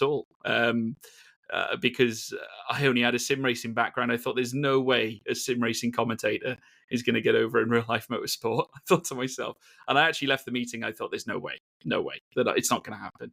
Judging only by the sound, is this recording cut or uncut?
uncut